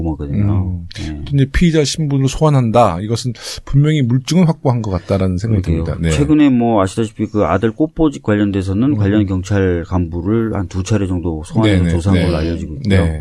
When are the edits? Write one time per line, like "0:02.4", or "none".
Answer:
none